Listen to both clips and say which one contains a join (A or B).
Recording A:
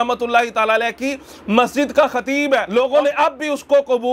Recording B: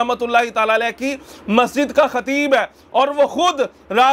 A